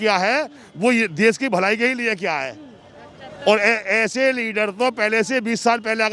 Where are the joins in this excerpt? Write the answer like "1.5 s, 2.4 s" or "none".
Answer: none